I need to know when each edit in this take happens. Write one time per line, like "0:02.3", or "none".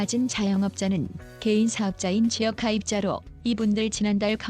0:02.9